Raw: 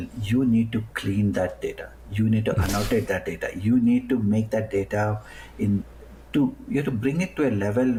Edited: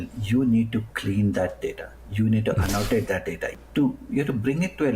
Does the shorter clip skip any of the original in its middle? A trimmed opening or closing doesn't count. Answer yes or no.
yes